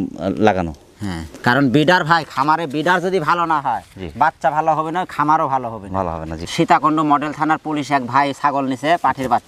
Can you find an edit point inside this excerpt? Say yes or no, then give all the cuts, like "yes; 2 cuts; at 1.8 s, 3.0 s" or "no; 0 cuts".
yes; 1 cut; at 6.4 s